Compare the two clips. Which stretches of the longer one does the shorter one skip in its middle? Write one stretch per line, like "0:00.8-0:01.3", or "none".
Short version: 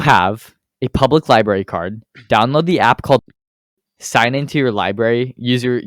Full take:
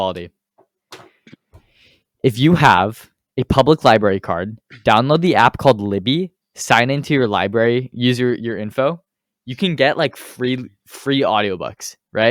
none